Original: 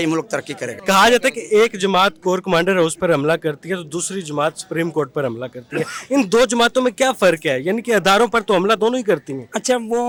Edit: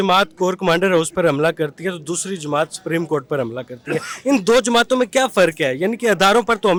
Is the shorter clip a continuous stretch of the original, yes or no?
yes